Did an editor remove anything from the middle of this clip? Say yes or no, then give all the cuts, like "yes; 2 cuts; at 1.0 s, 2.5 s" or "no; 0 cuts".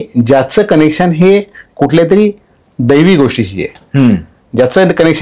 no; 0 cuts